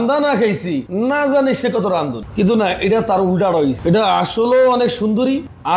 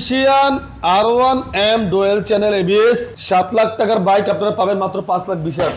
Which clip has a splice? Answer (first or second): first